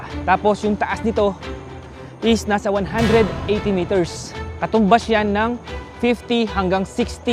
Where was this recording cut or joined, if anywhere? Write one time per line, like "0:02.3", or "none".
none